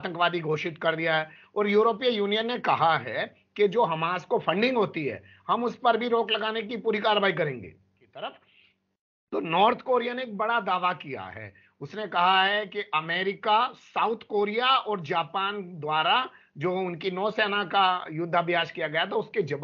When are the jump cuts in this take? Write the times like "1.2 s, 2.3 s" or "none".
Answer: 8.1 s